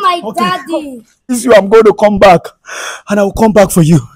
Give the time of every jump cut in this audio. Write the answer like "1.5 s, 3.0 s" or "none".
1.4 s